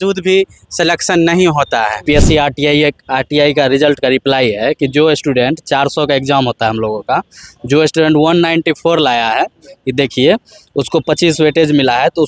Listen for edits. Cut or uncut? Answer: cut